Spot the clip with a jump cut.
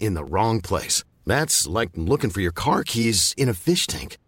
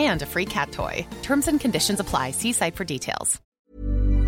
second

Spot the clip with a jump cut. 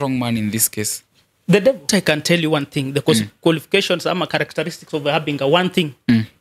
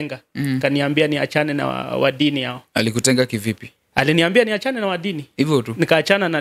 first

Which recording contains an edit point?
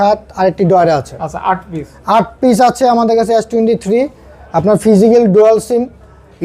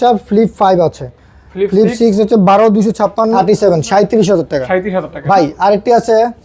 second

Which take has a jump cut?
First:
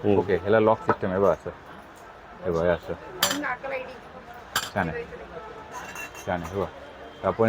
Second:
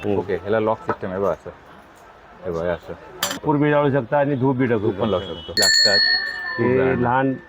second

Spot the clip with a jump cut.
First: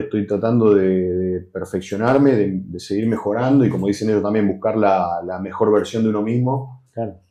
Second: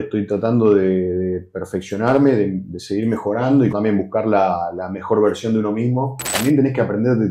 second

